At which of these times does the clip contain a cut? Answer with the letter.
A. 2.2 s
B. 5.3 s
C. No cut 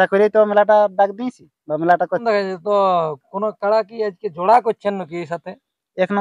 A